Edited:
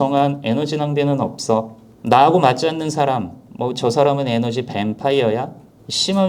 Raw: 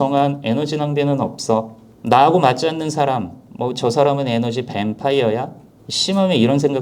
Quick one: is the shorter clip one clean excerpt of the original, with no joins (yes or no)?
yes